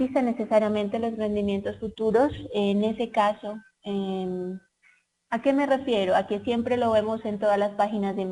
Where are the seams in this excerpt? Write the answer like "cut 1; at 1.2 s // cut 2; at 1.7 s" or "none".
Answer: cut 1; at 0.9 s